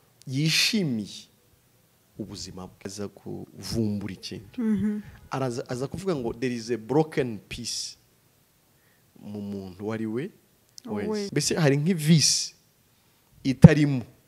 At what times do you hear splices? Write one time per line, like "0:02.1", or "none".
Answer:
0:02.9
0:11.3